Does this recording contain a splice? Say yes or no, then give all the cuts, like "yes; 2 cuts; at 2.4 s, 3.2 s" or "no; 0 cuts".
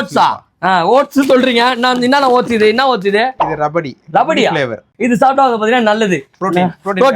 yes; 1 cut; at 4.9 s